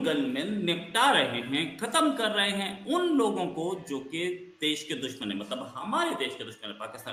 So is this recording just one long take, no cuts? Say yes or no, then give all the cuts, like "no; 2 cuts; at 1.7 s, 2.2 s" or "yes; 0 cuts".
yes; 0 cuts